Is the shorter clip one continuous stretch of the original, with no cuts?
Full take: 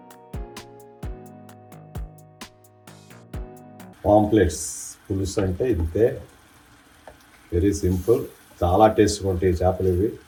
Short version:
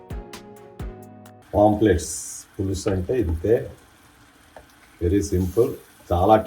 no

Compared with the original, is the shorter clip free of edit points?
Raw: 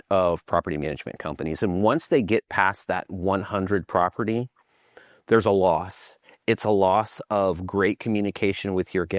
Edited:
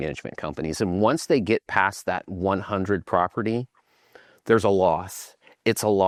yes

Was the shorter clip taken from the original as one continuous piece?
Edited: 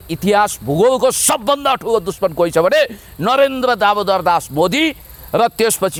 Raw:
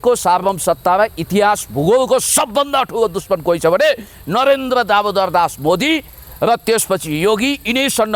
yes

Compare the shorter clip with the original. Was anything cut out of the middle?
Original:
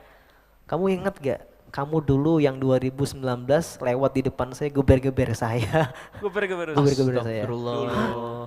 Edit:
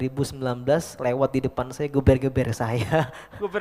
no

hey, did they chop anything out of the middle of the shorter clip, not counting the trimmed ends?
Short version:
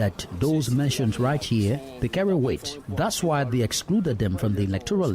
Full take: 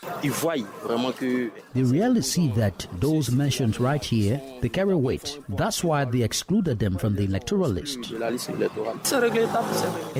no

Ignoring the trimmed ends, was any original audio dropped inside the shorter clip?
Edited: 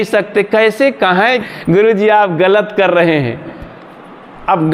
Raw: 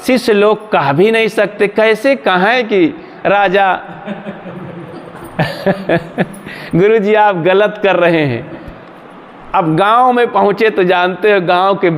yes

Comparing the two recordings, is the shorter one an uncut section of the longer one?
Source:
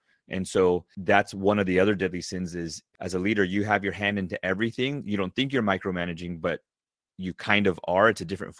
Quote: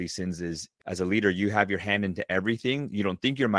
yes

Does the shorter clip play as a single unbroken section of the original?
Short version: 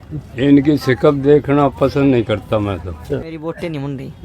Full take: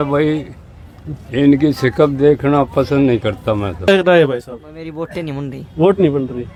no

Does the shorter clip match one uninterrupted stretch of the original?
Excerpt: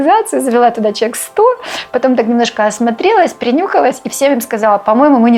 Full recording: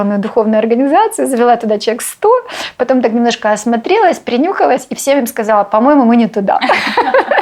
yes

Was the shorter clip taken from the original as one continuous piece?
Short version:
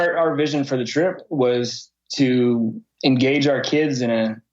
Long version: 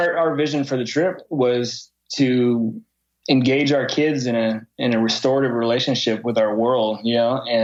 no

